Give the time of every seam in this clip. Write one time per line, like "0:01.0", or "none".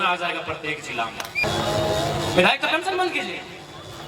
0:01.4